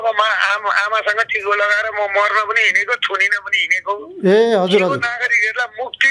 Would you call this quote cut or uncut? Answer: uncut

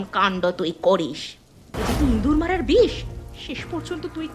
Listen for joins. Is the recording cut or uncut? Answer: cut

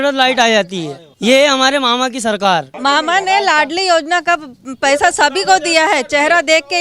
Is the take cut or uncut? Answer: cut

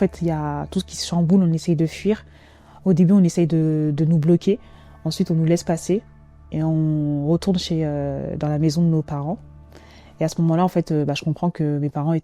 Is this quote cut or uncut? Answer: uncut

